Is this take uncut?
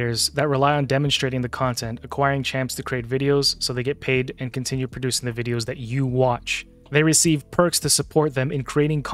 yes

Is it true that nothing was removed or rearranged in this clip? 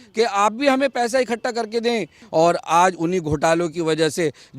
no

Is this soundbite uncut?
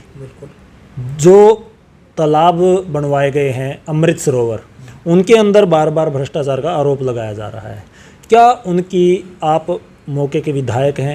yes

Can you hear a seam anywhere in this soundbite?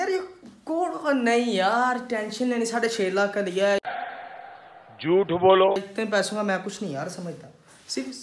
no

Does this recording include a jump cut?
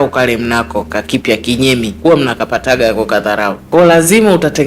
yes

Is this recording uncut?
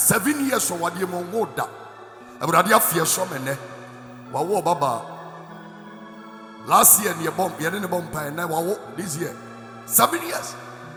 yes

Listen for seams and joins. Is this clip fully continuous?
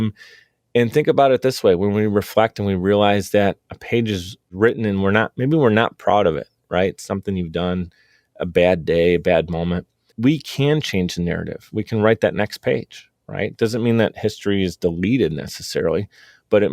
no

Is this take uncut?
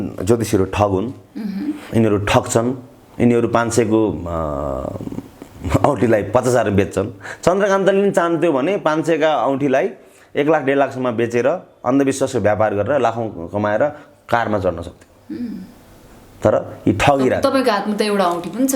yes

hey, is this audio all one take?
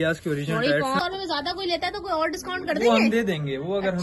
no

